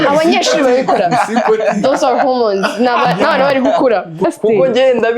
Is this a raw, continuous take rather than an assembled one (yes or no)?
no